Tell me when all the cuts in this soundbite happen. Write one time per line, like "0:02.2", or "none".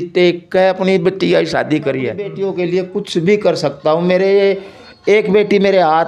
0:02.3